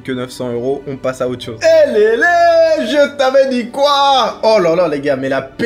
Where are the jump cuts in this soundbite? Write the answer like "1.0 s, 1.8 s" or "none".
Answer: 1.6 s